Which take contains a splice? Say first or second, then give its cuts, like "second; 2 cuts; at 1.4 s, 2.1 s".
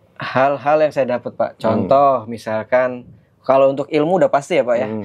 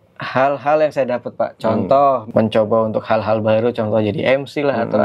second; 1 cut; at 2.2 s